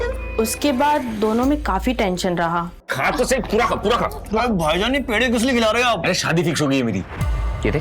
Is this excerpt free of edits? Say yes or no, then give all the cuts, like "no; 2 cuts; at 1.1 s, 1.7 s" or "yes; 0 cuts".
no; 1 cut; at 2.8 s